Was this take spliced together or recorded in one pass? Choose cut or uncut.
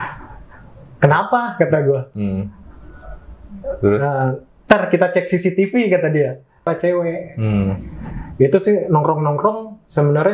cut